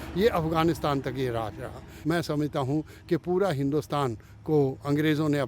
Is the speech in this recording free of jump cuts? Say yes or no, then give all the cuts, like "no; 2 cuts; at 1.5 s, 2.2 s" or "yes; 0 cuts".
no; 1 cut; at 1.9 s